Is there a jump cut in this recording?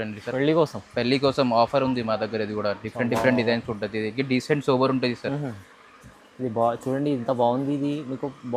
no; 0 cuts

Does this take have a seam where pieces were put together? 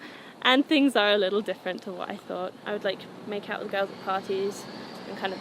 yes; 1 cut; at 2.6 s

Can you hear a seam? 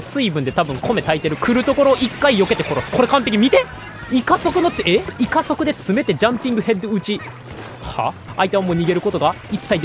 yes; 3 cuts; at 1.3 s, 5.1 s, 8.3 s

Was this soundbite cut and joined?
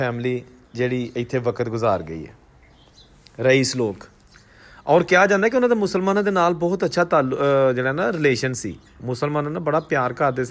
no; 0 cuts

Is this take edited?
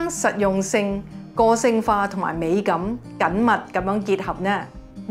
no; 0 cuts

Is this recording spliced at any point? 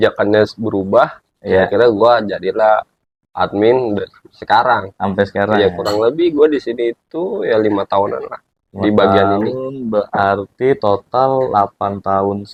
no; 0 cuts

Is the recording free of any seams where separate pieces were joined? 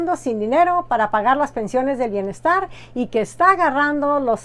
yes; 0 cuts

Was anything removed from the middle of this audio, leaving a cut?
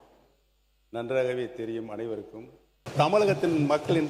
yes; 1 cut; at 2.8 s

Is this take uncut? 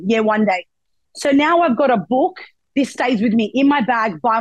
no; 1 cut; at 2.6 s

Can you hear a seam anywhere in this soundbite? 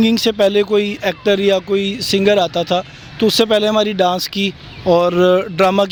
no; 0 cuts

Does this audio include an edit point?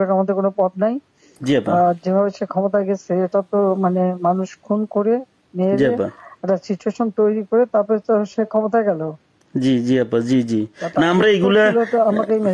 no; 0 cuts

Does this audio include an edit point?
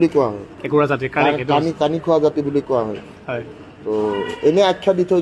no; 0 cuts

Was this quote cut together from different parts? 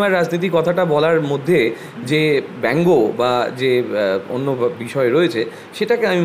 no; 0 cuts

